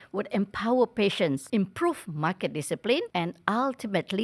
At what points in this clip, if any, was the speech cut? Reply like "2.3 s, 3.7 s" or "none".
1.4 s, 3.1 s